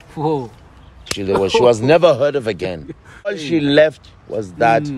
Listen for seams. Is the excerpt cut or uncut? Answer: cut